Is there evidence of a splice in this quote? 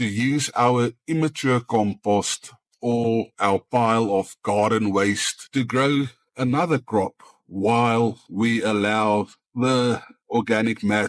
no; 0 cuts

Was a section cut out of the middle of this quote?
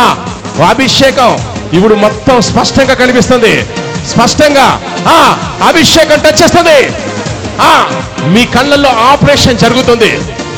no; 0 cuts

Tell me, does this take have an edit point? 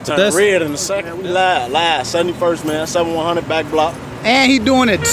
yes; 1 cut; at 1.1 s

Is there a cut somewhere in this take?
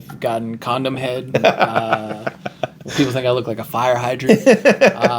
yes; 3 cuts; at 1.3 s, 2.9 s, 4.2 s

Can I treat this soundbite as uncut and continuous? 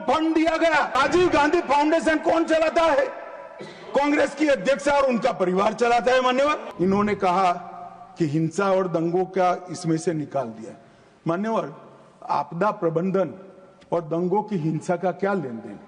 no; 2 cuts; at 1.0 s, 6.7 s

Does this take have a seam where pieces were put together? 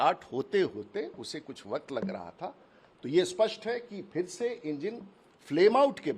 no; 0 cuts

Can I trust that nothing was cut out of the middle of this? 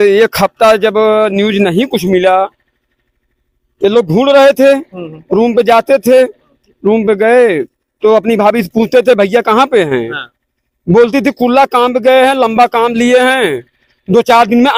yes; 0 cuts

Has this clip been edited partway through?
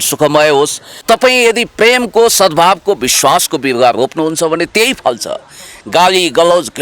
yes; 1 cut; at 1.0 s

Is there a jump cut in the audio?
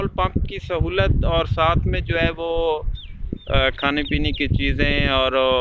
no; 0 cuts

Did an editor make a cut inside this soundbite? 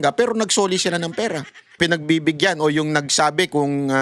yes; 1 cut; at 1.8 s

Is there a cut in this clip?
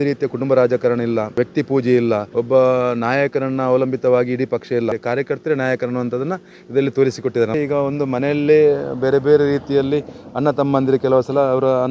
yes; 4 cuts; at 1.4 s, 2.3 s, 5.0 s, 7.6 s

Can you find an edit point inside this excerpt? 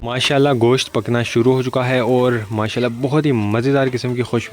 no; 0 cuts

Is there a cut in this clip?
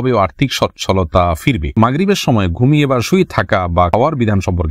yes; 2 cuts; at 1.7 s, 3.9 s

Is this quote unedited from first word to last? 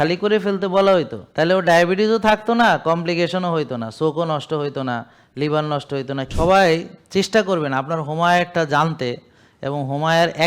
no; 2 cuts; at 1.2 s, 6.3 s

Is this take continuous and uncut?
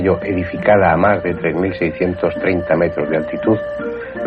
no; 1 cut; at 1.8 s

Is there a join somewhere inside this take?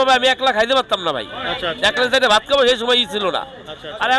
no; 0 cuts

